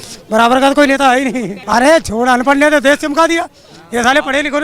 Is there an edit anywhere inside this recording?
yes; 1 cut; at 1.5 s

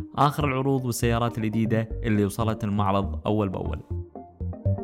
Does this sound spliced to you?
yes; 1 cut; at 3.8 s

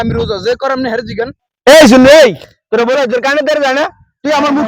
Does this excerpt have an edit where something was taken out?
yes; 1 cut; at 1.4 s

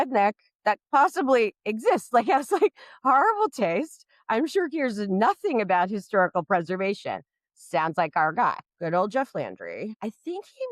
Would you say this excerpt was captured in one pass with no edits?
no; 2 cuts; at 8.7 s, 9.9 s

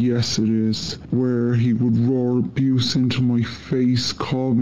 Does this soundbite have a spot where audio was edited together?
yes; 1 cut; at 0.9 s

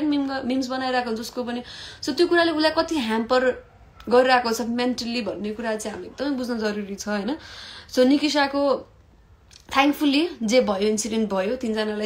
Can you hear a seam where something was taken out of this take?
no; 0 cuts

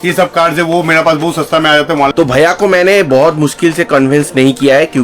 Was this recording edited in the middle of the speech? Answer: yes; 1 cut; at 2.1 s

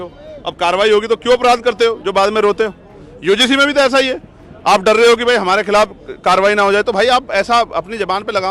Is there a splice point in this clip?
no; 0 cuts

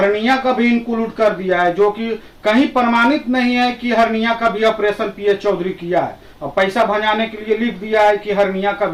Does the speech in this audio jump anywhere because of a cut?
no; 0 cuts

